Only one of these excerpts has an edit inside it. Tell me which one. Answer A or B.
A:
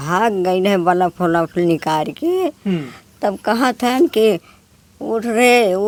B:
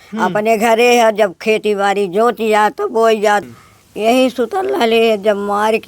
B